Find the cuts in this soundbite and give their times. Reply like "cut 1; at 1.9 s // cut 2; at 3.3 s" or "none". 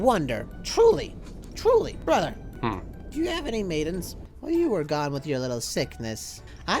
cut 1; at 4.2 s